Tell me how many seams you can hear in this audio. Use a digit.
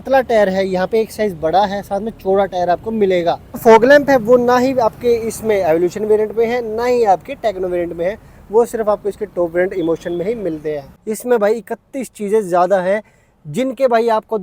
2